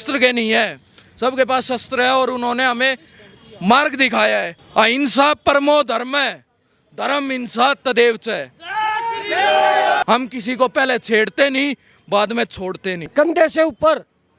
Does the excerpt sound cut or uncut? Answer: cut